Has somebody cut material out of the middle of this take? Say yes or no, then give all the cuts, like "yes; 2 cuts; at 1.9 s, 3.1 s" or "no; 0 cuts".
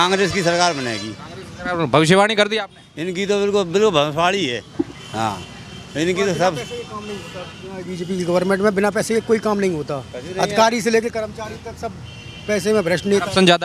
no; 0 cuts